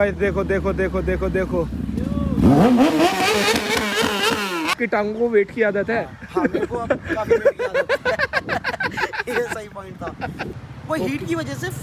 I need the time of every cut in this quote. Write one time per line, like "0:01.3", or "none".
0:04.8
0:10.5